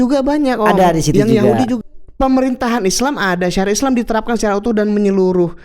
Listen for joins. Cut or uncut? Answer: cut